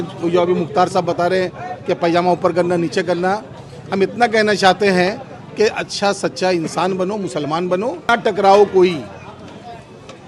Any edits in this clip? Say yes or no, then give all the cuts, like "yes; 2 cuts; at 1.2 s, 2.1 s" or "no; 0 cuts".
yes; 1 cut; at 8.0 s